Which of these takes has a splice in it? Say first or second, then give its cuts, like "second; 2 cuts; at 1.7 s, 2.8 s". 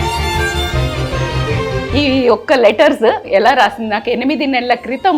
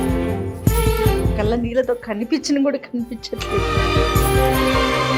first; 2 cuts; at 1.6 s, 3.2 s